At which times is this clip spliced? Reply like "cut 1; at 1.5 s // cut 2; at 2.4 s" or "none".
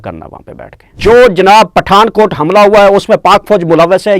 cut 1; at 0.9 s